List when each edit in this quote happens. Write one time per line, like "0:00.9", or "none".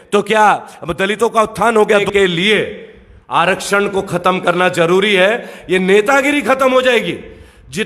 0:02.0